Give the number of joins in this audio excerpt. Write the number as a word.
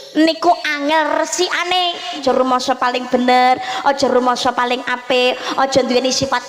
one